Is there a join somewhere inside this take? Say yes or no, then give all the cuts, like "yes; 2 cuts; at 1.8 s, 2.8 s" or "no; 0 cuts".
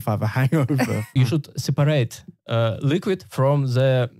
yes; 1 cut; at 1.1 s